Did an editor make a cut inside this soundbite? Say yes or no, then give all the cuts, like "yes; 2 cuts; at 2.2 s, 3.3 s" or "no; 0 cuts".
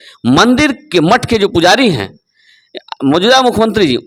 no; 0 cuts